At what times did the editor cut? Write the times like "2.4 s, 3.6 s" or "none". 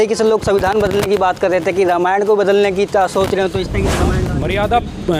4.3 s